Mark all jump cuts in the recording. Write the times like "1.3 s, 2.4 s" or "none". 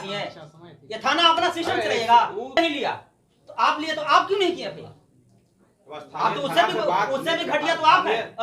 2.6 s